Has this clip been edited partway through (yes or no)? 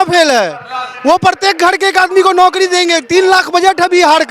no